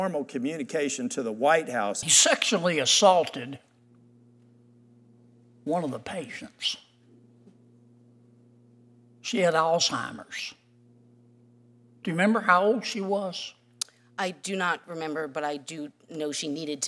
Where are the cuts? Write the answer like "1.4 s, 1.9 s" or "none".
2.1 s